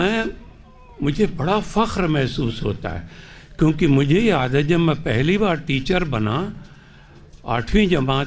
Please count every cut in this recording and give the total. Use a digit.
0